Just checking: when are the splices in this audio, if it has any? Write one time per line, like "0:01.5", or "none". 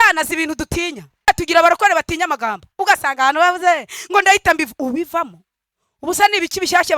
0:01.3